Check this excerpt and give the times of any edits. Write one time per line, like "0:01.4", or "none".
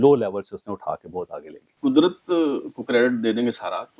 0:01.6